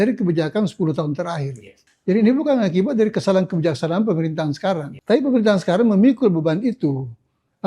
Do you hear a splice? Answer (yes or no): yes